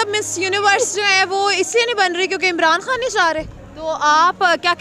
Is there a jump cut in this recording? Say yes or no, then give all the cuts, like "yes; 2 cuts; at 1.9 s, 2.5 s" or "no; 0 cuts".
yes; 1 cut; at 3.5 s